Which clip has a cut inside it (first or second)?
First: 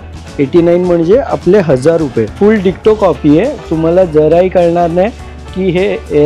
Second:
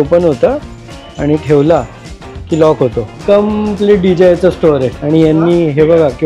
second